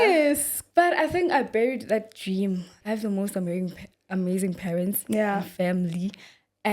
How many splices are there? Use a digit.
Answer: 1